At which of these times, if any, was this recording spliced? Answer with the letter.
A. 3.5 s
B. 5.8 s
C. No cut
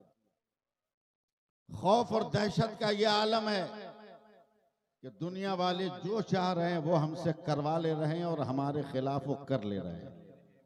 C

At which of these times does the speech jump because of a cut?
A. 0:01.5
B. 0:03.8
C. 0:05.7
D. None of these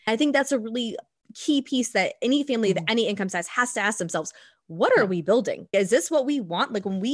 C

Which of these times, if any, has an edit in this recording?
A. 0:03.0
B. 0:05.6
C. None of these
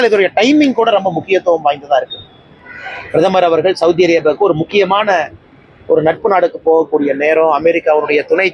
C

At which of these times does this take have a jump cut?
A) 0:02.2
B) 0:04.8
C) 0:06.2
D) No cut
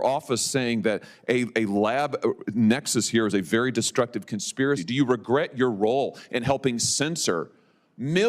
B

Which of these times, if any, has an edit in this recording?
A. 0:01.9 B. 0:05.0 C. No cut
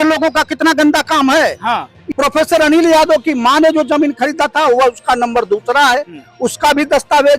A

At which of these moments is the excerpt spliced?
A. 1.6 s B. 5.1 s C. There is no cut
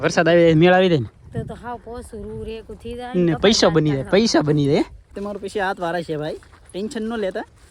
B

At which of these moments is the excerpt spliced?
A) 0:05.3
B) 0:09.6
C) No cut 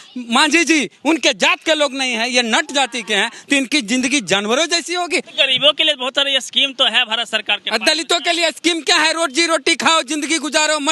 A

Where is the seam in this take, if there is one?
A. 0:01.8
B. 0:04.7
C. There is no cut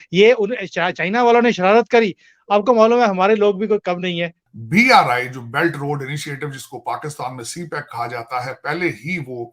B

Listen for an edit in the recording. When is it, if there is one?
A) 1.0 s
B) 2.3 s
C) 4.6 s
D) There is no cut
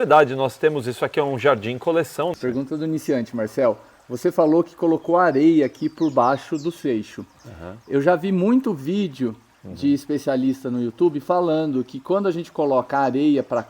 B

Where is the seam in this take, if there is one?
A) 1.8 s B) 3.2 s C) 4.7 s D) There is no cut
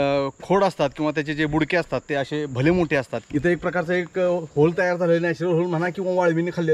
B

